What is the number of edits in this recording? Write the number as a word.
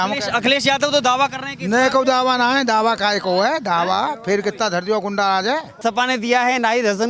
one